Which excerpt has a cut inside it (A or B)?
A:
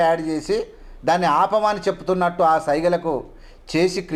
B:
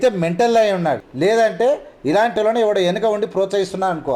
B